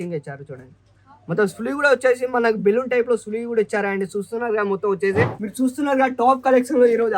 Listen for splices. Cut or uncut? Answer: cut